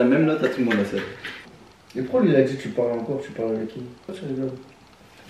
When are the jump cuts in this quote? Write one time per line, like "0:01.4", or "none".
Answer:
0:01.3
0:04.1

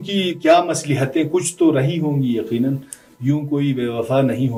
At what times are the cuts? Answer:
none

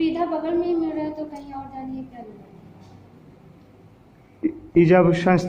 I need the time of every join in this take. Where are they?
none

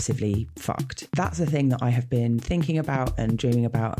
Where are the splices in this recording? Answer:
0:01.0

